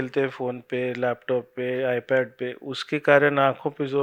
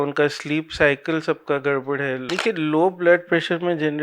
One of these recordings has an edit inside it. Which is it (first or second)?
second